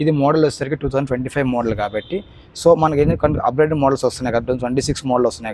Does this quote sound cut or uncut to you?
uncut